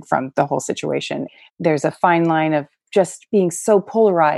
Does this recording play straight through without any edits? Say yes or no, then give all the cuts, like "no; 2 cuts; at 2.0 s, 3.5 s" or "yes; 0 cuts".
no; 2 cuts; at 1.4 s, 2.8 s